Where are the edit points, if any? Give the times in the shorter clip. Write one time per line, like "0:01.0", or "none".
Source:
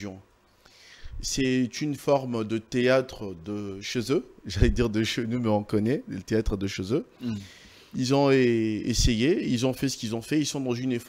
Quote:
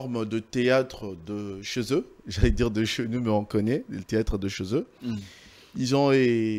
none